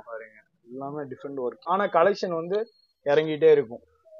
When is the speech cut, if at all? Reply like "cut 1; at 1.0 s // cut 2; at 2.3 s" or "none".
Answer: cut 1; at 1.6 s